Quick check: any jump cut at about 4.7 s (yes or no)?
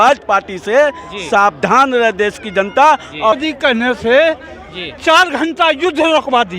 no